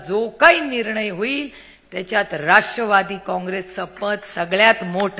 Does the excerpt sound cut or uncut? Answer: uncut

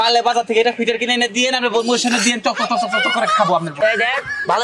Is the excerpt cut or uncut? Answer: cut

